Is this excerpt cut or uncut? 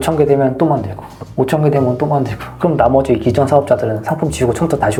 uncut